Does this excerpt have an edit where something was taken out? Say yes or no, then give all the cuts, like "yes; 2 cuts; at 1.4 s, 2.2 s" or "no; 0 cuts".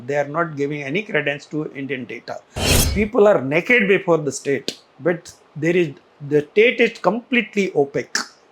yes; 1 cut; at 2.8 s